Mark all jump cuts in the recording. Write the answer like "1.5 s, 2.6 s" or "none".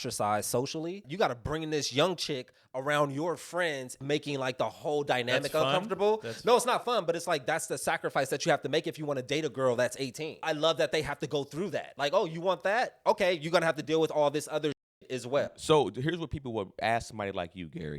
1.0 s, 4.0 s, 10.4 s, 11.9 s